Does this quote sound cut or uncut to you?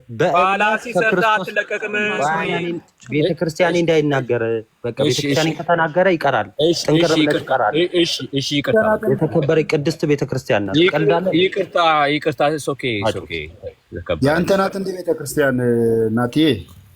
cut